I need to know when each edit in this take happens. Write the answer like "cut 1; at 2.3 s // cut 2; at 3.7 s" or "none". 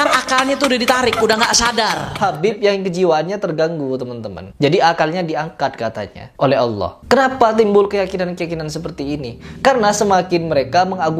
cut 1; at 2.1 s